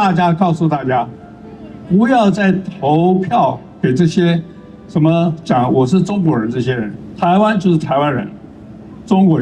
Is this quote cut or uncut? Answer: cut